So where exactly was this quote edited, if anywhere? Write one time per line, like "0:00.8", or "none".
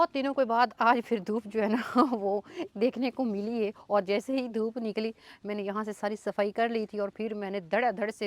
none